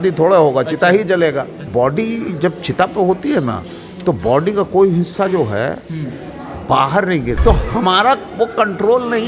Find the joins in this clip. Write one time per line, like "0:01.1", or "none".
0:01.7
0:07.4